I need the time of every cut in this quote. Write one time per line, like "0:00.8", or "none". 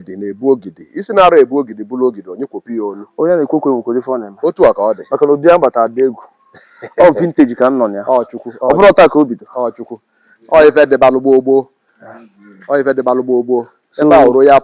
none